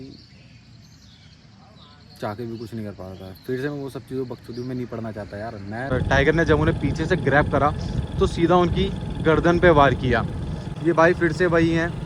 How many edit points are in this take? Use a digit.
2